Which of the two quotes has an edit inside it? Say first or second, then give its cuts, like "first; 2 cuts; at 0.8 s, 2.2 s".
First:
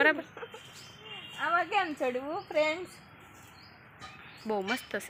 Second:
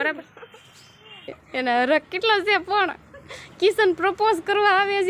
second; 1 cut; at 1.4 s